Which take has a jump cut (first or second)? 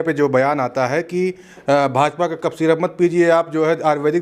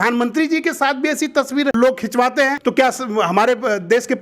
second